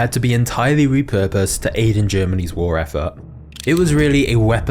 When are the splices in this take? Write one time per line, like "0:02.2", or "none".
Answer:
0:03.4

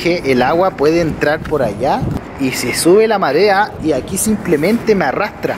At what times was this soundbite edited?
0:02.2
0:03.7

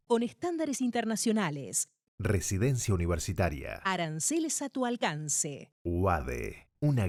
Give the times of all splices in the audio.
none

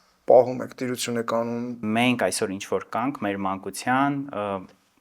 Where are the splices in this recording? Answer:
0:01.8

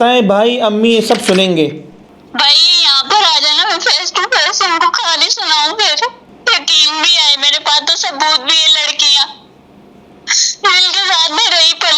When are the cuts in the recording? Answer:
0:01.9
0:06.3

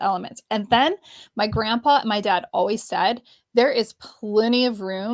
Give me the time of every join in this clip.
none

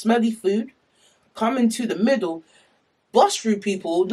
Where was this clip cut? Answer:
none

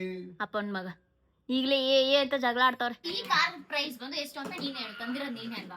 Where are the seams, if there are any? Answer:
0:03.0

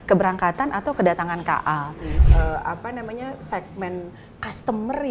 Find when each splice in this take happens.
0:02.2

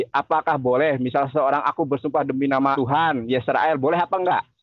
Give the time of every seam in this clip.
0:02.7

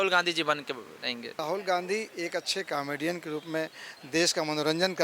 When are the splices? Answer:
0:01.4

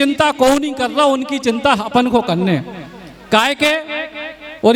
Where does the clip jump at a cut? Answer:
none

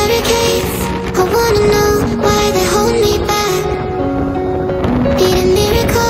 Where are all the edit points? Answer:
none

